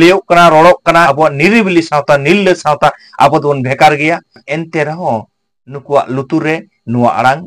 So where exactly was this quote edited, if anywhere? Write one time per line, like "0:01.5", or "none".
0:01.1
0:04.4